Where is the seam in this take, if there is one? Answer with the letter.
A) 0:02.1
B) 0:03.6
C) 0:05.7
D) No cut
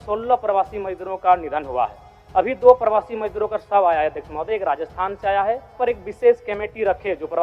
C